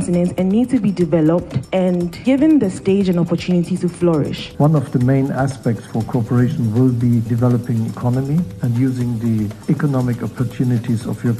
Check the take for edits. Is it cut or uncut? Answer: cut